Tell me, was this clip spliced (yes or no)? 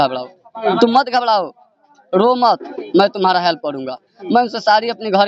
no